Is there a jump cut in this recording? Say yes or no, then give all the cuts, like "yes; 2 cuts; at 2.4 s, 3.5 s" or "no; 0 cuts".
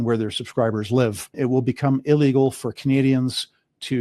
yes; 1 cut; at 1.3 s